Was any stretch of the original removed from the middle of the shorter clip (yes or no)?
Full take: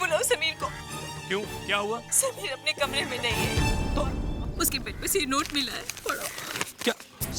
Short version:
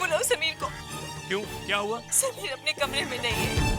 no